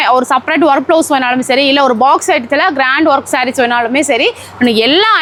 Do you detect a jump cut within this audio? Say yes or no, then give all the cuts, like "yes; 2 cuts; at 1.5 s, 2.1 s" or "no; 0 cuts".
no; 0 cuts